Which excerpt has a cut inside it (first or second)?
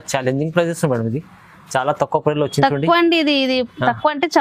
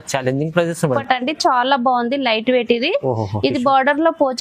second